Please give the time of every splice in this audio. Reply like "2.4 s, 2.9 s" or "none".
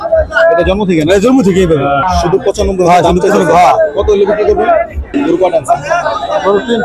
2.0 s, 5.1 s